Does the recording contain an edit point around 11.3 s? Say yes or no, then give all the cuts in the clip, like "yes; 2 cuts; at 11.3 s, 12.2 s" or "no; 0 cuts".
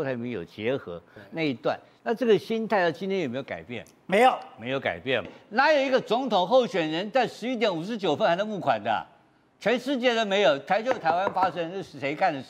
no; 1 cut; at 5.4 s